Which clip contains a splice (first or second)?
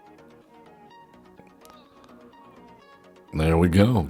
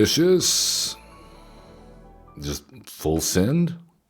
second